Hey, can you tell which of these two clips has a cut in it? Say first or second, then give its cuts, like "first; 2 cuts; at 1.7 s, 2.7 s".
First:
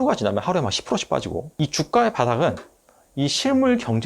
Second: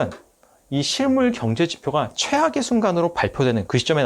first; 1 cut; at 1.5 s